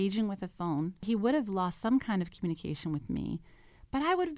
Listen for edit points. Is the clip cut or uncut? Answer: cut